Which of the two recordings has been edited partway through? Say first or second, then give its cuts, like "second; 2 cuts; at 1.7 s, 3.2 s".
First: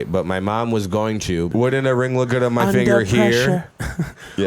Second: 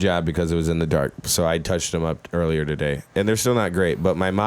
first; 1 cut; at 1.5 s